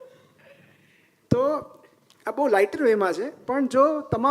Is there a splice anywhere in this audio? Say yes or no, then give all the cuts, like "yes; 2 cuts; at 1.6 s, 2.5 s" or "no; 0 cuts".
no; 0 cuts